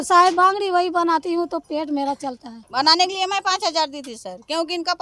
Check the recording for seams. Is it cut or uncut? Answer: cut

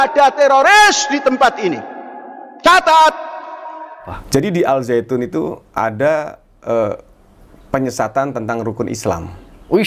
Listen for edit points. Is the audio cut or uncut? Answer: cut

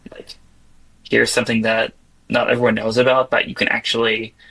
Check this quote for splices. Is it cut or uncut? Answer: uncut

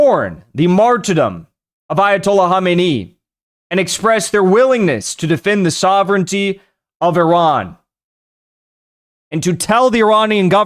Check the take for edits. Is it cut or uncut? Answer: uncut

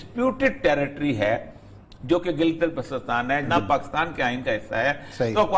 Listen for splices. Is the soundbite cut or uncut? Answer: cut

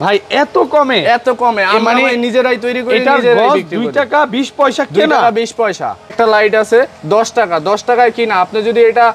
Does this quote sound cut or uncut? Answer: cut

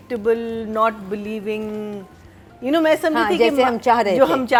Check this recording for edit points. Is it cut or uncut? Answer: uncut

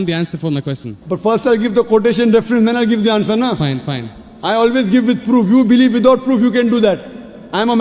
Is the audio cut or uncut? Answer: uncut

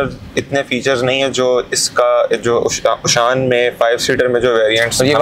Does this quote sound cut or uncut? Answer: uncut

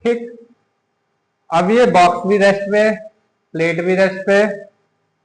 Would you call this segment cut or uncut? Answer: uncut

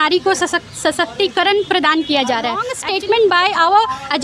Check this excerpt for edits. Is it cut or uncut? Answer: cut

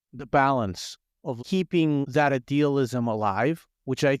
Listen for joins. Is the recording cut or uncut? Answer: cut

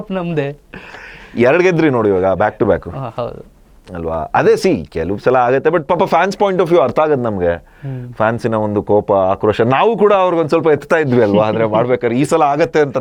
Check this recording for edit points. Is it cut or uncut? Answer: uncut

